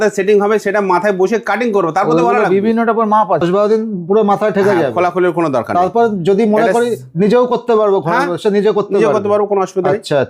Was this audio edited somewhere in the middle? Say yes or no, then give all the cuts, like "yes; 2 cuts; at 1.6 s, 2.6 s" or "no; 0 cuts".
yes; 1 cut; at 3.4 s